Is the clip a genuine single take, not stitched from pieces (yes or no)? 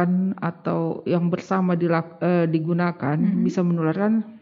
yes